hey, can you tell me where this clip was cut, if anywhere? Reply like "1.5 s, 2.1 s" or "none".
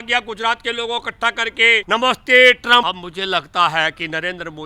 1.8 s, 2.8 s